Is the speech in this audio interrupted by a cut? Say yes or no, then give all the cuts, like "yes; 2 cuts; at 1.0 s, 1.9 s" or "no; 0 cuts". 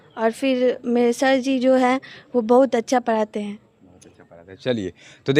no; 0 cuts